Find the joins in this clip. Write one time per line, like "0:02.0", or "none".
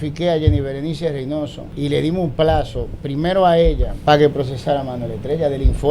0:01.6
0:03.9